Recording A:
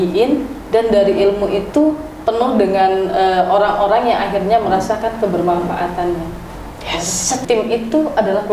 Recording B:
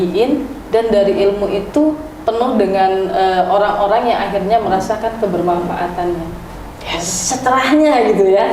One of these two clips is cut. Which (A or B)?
A